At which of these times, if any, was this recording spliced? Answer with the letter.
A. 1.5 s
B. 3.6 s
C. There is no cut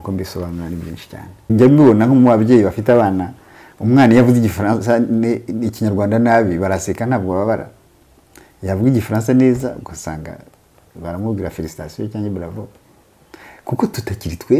A